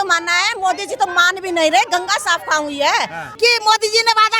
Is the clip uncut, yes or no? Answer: no